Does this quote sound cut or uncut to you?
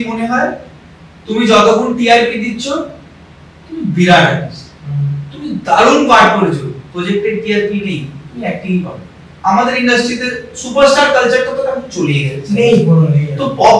cut